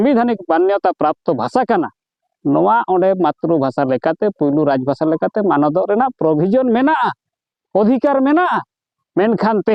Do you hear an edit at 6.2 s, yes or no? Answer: no